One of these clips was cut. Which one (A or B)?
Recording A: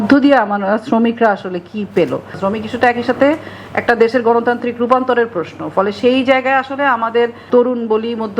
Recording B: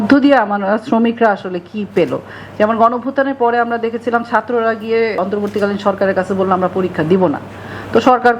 A